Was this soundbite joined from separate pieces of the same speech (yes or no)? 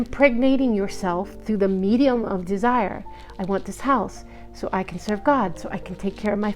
no